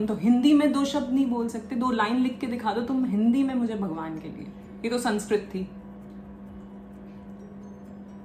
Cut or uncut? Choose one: uncut